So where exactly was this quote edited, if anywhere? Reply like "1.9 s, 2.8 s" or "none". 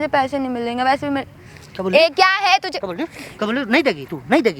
none